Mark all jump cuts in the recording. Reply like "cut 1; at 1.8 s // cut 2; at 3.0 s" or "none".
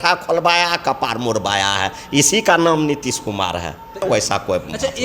cut 1; at 4.0 s